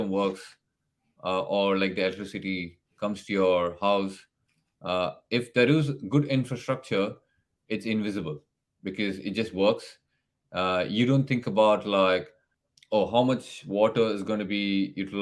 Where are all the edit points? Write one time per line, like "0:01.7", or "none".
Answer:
none

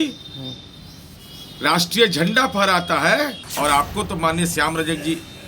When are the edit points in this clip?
0:03.4

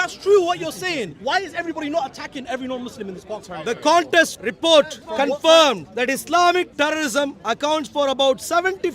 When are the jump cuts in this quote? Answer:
0:01.1
0:03.3
0:04.4
0:05.0
0:05.9

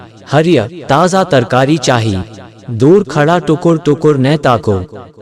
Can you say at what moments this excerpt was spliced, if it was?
0:02.3

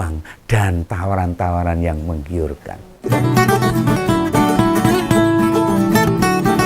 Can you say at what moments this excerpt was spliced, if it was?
0:02.9

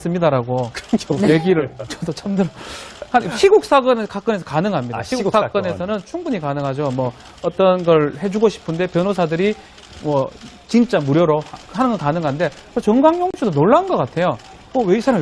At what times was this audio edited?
0:04.7

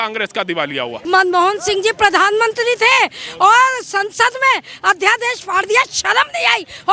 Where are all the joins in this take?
0:00.9

